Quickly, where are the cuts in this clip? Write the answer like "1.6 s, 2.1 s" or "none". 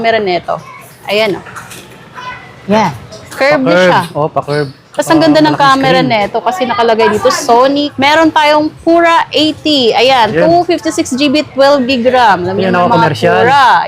7.9 s